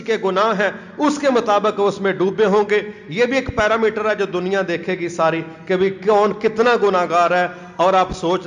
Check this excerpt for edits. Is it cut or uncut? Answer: uncut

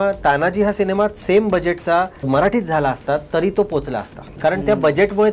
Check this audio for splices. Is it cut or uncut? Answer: cut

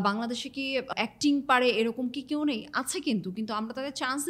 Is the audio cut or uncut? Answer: cut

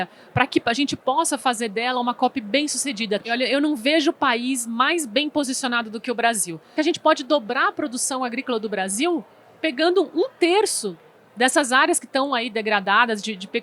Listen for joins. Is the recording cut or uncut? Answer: cut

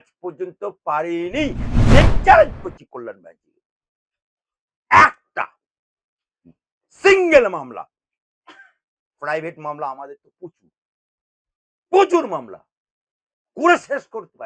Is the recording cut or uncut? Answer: cut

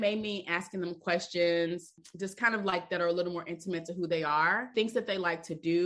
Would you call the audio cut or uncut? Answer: cut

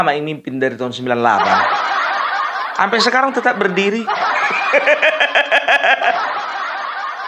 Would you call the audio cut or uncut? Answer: uncut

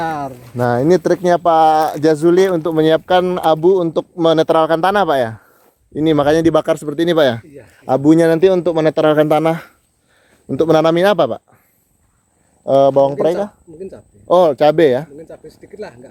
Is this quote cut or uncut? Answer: uncut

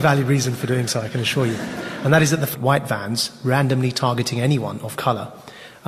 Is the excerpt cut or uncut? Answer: uncut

